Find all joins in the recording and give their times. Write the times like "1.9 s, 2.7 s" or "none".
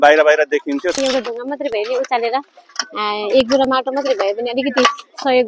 0.9 s